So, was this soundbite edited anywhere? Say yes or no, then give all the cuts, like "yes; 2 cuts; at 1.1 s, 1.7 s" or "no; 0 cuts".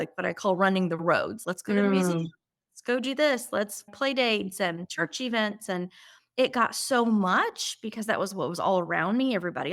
no; 0 cuts